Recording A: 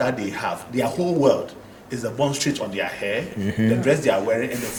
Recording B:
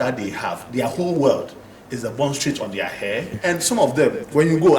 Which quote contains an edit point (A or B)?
B